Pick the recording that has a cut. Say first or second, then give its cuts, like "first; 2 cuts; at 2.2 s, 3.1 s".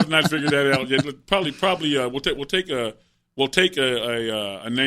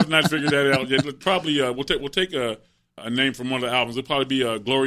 second; 2 cuts; at 1.2 s, 2.9 s